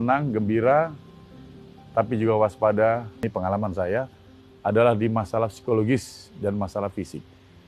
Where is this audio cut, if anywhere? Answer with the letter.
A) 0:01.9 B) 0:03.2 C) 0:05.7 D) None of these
B